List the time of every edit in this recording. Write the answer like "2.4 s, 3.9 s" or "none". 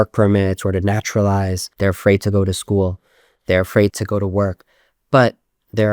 1.6 s, 3.9 s